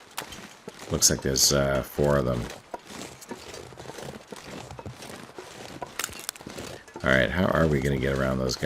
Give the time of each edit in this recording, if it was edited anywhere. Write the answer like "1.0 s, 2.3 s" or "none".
7.0 s